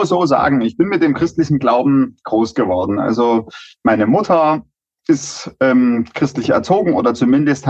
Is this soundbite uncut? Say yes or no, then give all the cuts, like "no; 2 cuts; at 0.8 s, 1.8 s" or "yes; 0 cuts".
yes; 0 cuts